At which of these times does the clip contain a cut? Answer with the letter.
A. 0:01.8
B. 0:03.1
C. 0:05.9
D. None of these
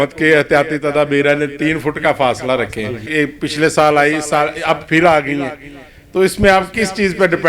B